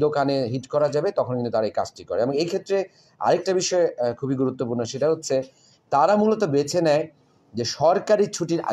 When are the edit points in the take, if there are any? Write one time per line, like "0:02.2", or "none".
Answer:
none